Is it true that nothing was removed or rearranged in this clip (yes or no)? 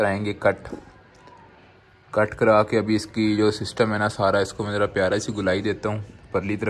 yes